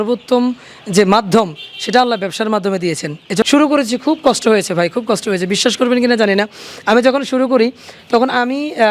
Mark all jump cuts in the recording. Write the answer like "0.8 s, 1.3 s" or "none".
3.4 s